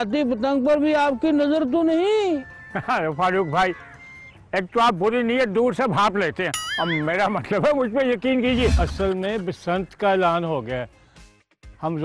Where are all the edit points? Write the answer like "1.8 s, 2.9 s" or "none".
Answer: 8.8 s